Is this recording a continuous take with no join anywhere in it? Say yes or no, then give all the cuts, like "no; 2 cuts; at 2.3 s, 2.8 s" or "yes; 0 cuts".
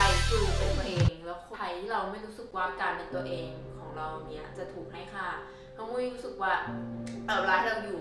no; 1 cut; at 1.5 s